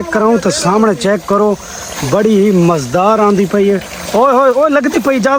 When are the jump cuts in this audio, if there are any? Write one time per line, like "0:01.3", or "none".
none